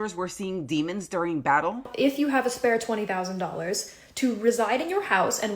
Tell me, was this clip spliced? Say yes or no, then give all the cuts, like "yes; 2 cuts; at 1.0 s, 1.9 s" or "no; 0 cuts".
yes; 1 cut; at 1.9 s